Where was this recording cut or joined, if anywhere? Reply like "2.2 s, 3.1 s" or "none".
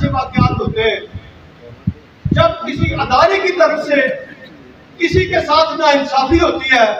none